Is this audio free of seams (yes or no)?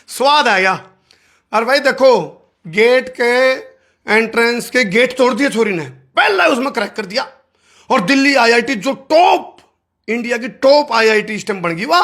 yes